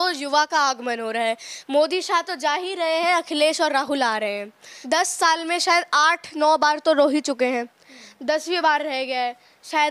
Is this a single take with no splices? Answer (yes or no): no